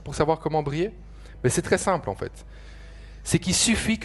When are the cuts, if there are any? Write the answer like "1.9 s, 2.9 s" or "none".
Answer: none